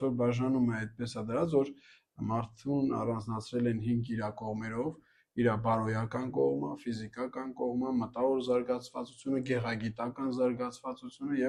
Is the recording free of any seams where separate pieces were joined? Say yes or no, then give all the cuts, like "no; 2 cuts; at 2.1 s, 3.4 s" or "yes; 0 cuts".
yes; 0 cuts